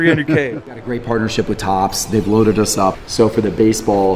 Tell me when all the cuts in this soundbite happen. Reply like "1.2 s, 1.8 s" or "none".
0.8 s, 3.0 s